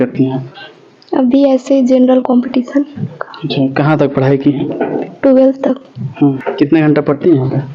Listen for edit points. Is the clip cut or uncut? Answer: cut